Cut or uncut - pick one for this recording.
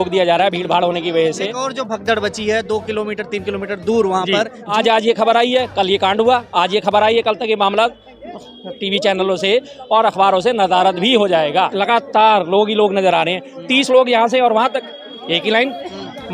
cut